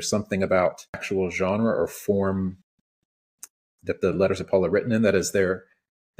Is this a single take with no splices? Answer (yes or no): no